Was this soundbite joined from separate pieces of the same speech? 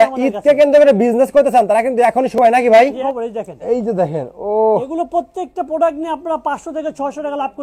yes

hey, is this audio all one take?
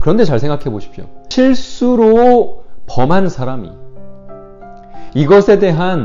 no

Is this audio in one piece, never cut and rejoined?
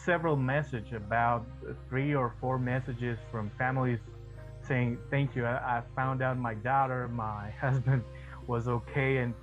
yes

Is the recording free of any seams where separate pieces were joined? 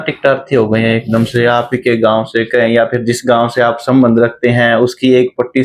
yes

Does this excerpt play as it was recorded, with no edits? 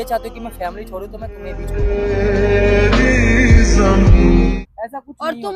no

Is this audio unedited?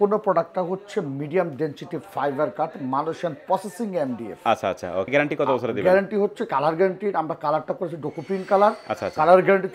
yes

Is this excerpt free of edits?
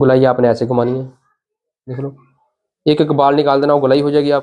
yes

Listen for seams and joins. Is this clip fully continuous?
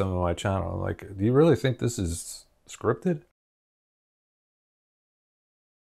yes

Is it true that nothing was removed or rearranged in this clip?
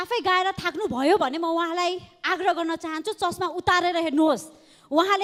yes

